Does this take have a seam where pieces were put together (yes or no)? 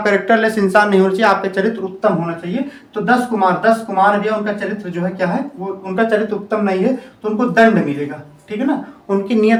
no